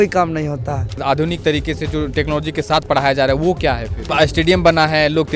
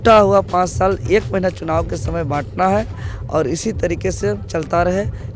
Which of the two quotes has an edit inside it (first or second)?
first